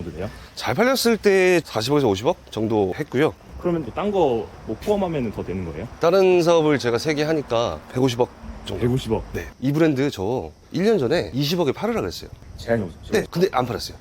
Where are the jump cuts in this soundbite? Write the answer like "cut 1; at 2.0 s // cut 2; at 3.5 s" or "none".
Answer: cut 1; at 1.7 s // cut 2; at 3.6 s // cut 3; at 5.8 s // cut 4; at 9.4 s